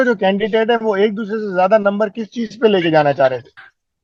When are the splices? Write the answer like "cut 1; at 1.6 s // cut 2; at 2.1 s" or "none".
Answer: none